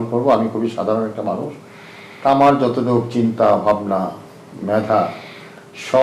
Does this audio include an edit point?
no; 0 cuts

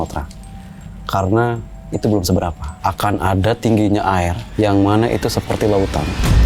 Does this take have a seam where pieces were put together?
yes; 2 cuts; at 2.7 s, 4.4 s

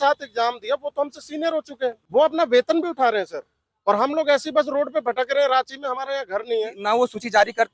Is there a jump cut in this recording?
yes; 2 cuts; at 2.0 s, 6.8 s

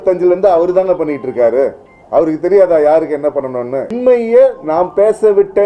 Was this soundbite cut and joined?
yes; 1 cut; at 3.9 s

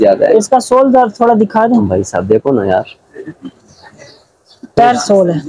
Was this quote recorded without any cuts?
yes; 0 cuts

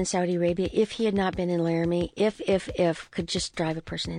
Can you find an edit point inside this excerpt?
no; 0 cuts

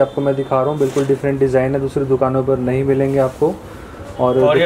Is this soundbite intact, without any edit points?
yes; 0 cuts

